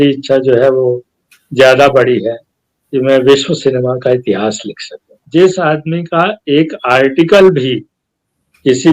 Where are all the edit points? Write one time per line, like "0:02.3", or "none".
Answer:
0:05.2